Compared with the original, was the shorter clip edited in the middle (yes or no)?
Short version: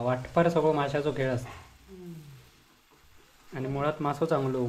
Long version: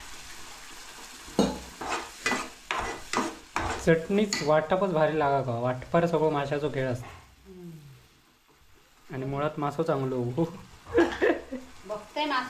no